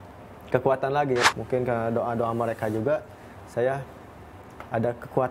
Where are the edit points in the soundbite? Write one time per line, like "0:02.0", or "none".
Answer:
0:01.2